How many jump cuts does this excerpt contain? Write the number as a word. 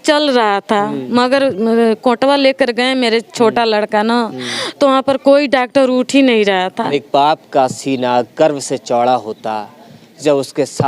one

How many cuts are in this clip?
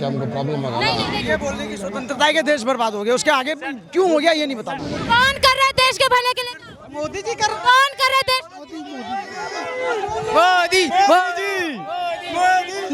two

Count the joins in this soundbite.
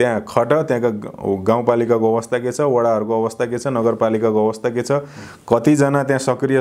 zero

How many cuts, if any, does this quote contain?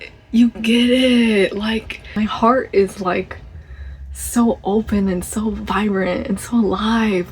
one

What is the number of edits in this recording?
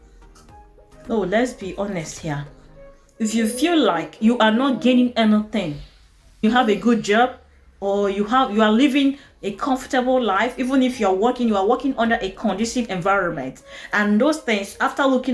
one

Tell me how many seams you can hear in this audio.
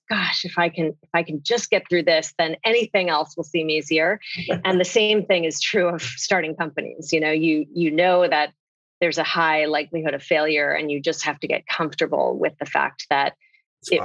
zero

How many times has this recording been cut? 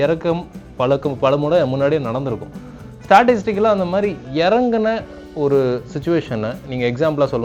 zero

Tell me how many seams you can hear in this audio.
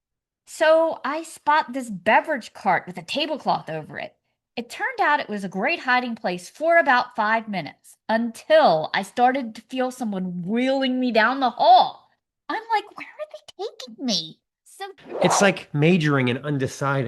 one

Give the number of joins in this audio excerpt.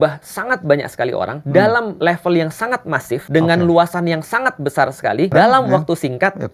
four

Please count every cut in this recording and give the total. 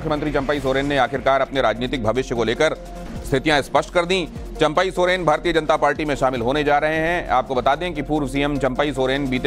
one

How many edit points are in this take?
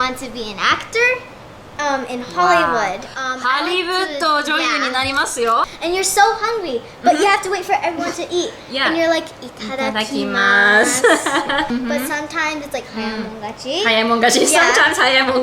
two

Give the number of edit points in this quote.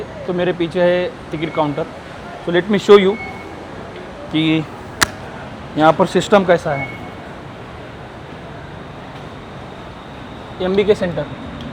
zero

